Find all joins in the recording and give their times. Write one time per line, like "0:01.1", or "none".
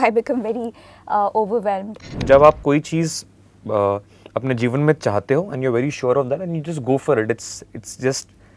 0:02.2